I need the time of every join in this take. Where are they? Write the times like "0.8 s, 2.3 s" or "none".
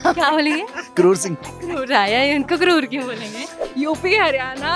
3.6 s